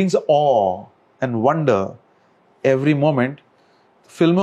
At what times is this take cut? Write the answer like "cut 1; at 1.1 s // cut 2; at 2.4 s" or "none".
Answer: none